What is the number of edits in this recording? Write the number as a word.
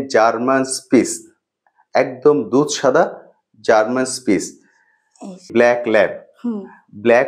one